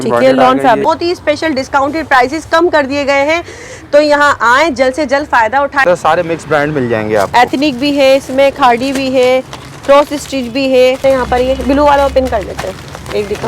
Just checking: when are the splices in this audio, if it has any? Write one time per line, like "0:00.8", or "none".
0:00.9
0:05.8
0:11.0

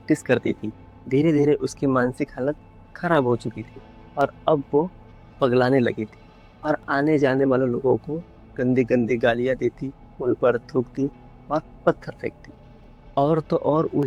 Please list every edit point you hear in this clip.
none

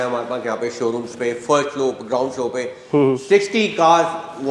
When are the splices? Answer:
none

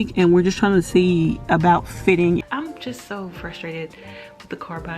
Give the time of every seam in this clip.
0:02.4

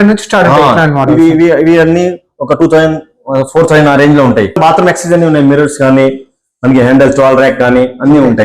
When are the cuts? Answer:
0:04.5

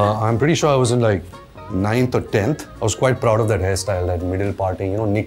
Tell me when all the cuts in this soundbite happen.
0:02.7

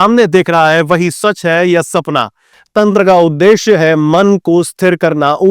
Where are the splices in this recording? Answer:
0:02.6

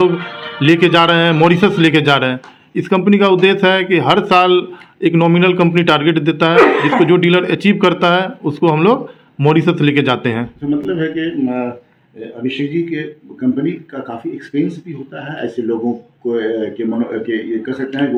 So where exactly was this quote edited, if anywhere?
none

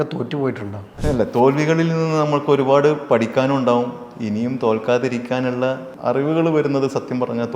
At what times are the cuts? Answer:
0:00.9
0:05.9

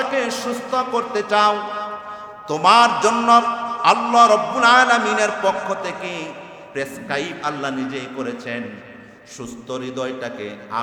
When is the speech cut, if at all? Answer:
none

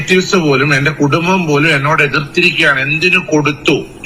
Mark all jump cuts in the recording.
none

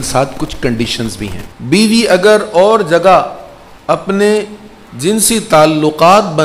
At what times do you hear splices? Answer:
0:01.5

